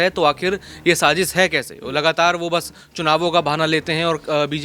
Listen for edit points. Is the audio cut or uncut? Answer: uncut